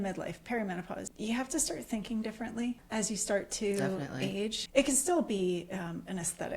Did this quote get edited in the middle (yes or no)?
yes